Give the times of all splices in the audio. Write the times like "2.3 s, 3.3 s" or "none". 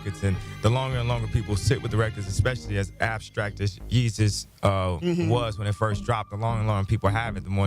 6.1 s